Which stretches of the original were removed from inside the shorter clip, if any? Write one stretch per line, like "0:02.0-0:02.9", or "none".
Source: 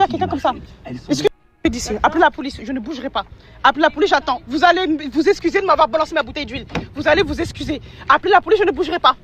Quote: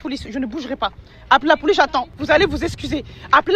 0:04.4-0:06.9

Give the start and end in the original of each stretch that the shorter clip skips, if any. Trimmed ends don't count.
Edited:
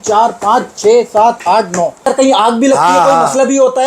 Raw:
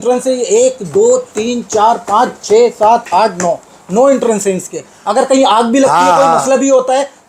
0:03.6-0:05.1

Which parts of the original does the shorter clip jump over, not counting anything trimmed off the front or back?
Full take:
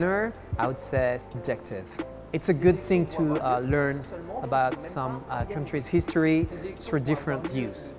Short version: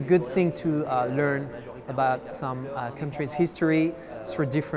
none

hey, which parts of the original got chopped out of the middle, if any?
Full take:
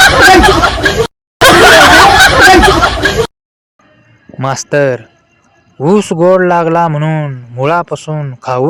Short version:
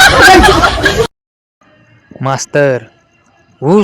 0:01.2-0:03.4

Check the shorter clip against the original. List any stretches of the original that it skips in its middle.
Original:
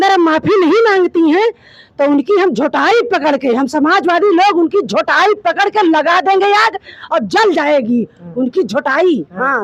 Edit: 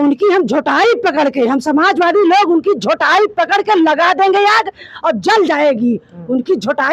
none

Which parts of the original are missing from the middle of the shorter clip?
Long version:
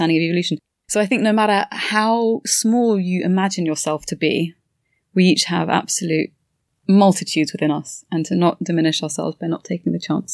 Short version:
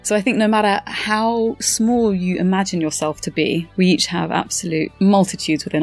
0:04.5-0:05.1
0:06.3-0:06.8

